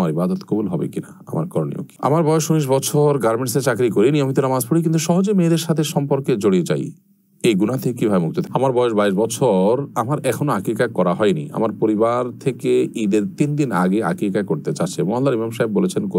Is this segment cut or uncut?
cut